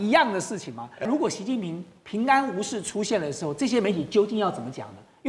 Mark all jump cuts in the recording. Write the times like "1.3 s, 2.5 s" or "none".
1.1 s